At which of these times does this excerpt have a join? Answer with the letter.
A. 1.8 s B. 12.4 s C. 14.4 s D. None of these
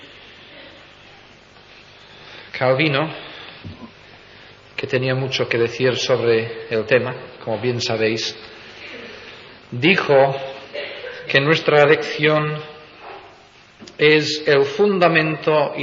C